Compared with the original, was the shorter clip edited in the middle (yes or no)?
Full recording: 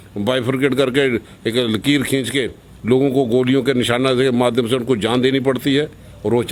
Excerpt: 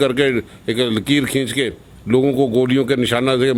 no